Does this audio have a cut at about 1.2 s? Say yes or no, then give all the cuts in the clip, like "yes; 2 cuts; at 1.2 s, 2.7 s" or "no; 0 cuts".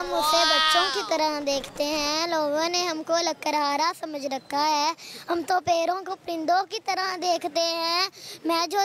no; 0 cuts